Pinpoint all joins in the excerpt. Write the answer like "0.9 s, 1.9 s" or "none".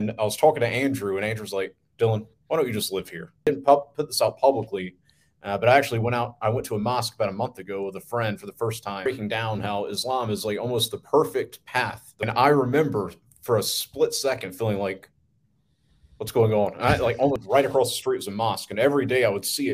3.5 s, 9.1 s, 12.3 s, 17.4 s